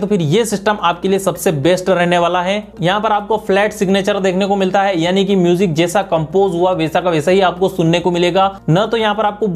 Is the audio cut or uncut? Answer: uncut